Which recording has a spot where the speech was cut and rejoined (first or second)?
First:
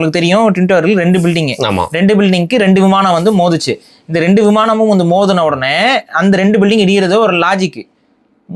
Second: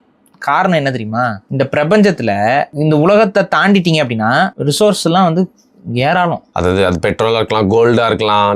second